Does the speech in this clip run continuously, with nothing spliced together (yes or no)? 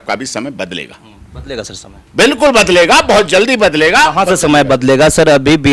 yes